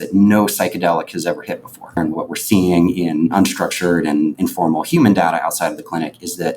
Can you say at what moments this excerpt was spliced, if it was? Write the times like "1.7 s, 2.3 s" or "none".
2.0 s, 3.3 s, 4.4 s